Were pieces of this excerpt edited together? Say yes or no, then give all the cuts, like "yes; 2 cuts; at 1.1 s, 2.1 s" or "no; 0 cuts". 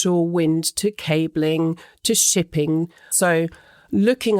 yes; 1 cut; at 3.1 s